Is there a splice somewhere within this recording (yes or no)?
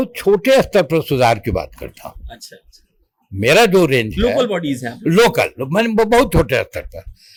no